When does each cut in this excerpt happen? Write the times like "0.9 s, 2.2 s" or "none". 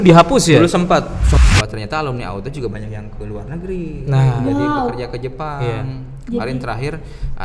1.3 s